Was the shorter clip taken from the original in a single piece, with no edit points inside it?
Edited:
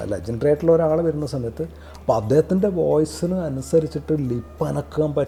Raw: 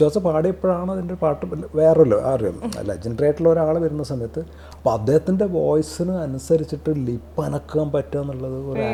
yes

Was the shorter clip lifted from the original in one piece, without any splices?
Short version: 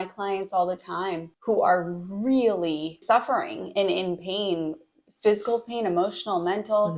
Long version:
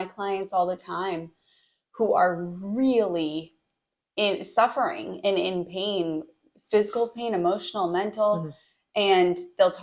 no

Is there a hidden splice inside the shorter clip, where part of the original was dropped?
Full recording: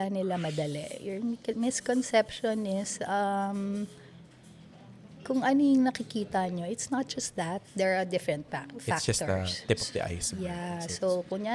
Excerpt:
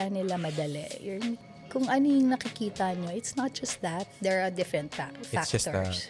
yes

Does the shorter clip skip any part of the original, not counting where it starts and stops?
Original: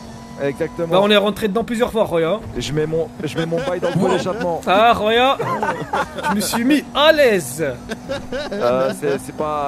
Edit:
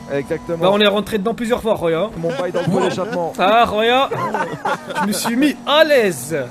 yes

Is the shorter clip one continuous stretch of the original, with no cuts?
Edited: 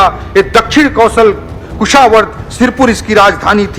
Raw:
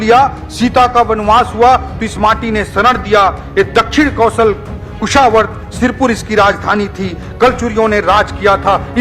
yes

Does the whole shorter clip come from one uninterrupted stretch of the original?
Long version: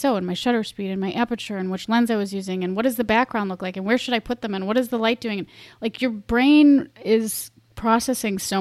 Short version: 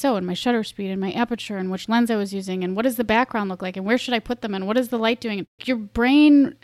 no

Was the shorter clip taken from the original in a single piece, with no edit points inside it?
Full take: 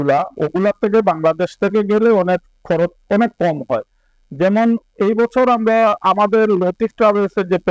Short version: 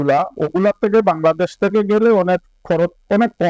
yes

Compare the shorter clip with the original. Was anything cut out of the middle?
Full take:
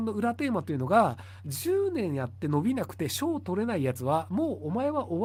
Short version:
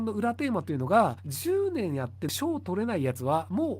yes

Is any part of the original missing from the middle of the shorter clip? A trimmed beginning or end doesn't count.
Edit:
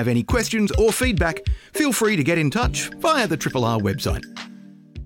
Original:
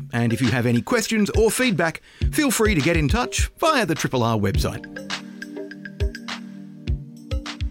yes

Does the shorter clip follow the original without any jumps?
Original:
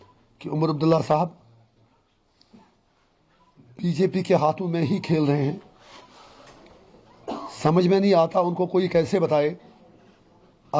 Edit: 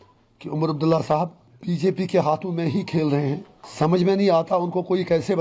no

